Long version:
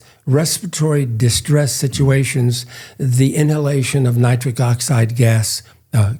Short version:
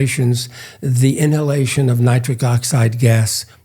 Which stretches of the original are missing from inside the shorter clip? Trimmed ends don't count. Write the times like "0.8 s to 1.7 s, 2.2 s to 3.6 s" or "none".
none